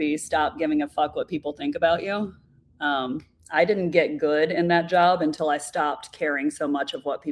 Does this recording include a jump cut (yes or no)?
no